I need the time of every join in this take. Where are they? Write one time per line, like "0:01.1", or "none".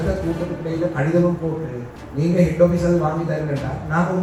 none